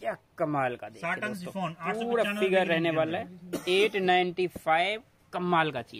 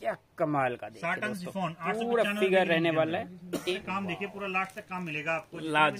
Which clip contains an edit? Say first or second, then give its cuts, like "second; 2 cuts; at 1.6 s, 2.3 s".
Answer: second; 1 cut; at 3.7 s